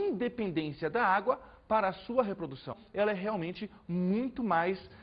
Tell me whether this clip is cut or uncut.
uncut